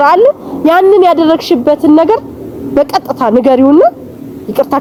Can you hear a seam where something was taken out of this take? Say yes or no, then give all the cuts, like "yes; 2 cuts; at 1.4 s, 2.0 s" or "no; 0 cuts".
no; 0 cuts